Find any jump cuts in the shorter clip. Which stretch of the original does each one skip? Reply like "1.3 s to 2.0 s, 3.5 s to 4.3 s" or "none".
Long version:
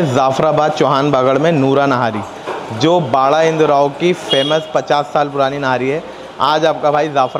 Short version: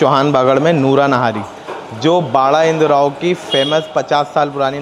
none